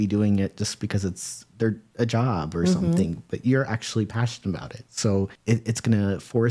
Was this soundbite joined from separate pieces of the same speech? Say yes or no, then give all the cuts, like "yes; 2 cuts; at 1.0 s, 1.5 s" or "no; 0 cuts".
yes; 1 cut; at 5.4 s